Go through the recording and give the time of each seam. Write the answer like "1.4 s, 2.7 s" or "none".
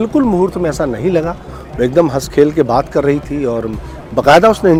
none